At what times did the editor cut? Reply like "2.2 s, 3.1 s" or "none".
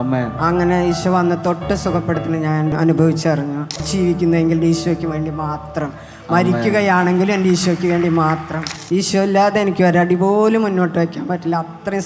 2.7 s, 3.9 s, 8.7 s